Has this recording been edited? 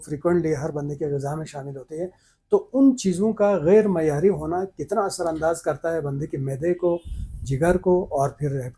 no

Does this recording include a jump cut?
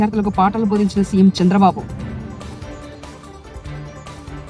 no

